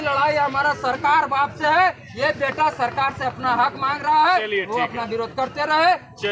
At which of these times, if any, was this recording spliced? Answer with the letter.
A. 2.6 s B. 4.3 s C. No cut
C